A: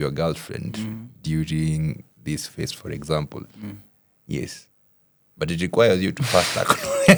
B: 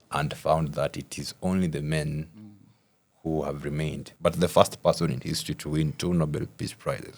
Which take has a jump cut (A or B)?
B